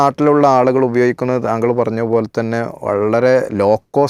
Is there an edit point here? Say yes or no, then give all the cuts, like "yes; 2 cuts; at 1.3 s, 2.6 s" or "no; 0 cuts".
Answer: no; 0 cuts